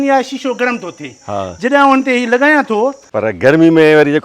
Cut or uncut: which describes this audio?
cut